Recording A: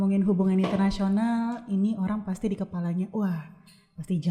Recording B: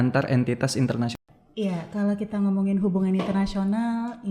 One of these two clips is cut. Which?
B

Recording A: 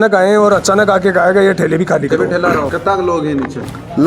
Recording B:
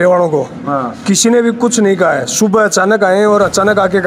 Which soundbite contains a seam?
A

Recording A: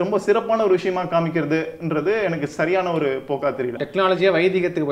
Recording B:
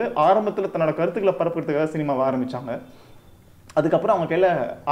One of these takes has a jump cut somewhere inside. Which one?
A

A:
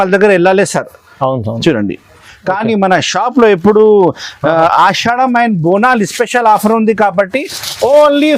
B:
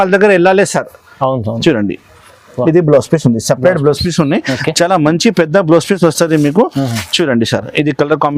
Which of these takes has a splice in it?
A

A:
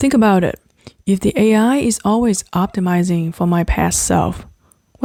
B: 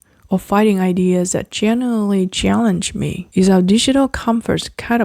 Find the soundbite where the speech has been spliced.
B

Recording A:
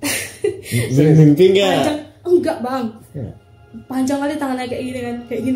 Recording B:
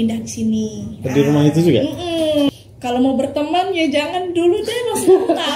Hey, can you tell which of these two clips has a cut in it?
B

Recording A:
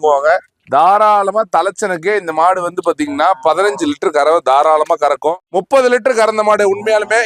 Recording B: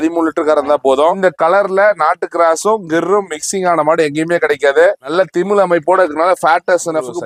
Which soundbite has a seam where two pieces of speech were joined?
A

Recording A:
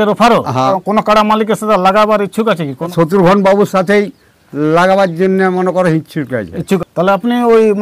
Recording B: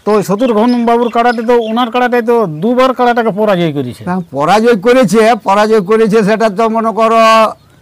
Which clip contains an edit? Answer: A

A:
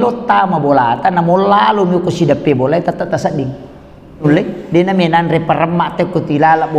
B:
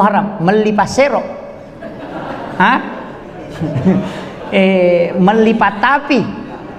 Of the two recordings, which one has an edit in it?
A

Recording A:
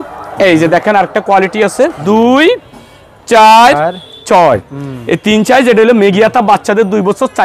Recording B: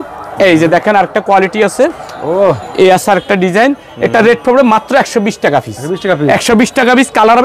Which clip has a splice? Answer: A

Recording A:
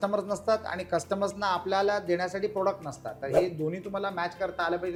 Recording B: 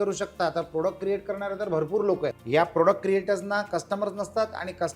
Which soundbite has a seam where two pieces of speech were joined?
B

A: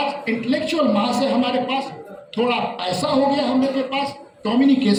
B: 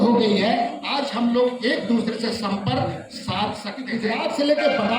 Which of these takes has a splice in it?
B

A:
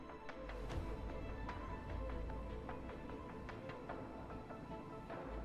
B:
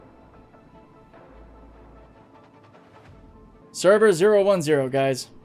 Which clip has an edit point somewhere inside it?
B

